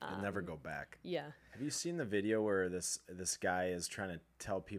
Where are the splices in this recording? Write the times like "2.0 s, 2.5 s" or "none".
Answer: 1.4 s

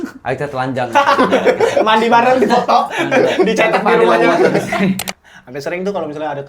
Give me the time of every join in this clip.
5.1 s

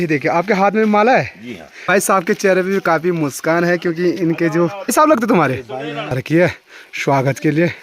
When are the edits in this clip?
1.8 s, 4.5 s, 6.2 s

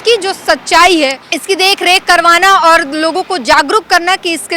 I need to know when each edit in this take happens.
1.3 s

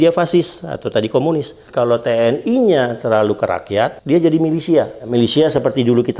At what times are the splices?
4.0 s, 5.0 s

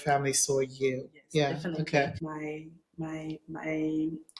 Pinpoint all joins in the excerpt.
2.2 s

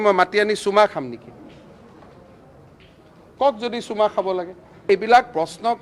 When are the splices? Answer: 4.9 s

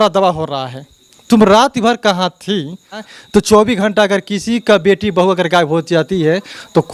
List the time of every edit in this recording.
3.1 s

